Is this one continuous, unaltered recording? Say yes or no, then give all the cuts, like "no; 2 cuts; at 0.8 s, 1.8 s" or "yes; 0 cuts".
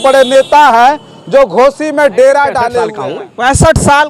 no; 1 cut; at 2.9 s